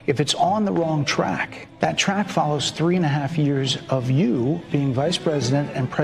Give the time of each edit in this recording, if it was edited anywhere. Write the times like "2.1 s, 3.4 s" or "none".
1.6 s

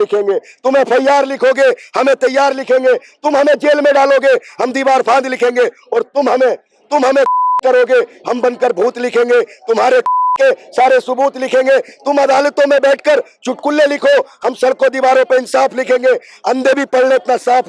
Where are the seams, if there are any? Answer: none

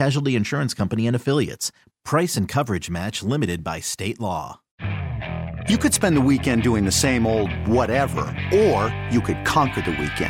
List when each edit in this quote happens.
4.6 s

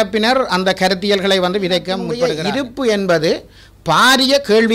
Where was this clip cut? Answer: 2.2 s

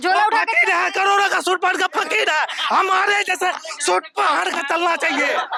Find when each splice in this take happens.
none

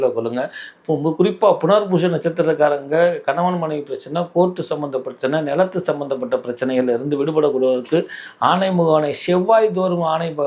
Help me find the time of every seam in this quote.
none

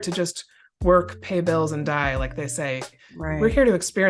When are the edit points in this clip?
none

